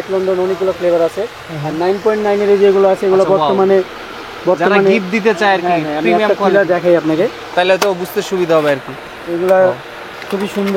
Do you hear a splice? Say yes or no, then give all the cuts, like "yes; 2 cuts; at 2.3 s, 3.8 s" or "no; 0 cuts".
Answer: no; 0 cuts